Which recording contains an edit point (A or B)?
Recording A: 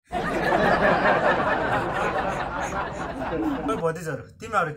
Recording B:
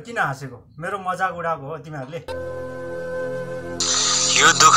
B